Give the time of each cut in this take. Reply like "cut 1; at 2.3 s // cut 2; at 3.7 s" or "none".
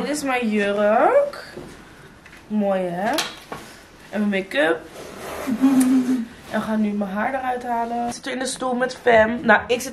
cut 1; at 8.2 s